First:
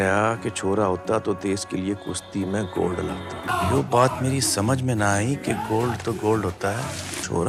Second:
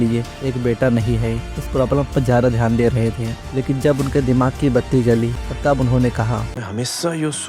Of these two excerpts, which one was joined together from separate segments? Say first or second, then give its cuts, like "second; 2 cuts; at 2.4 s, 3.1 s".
second; 1 cut; at 5.4 s